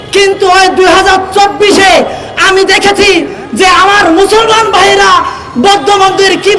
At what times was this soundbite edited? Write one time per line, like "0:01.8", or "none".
none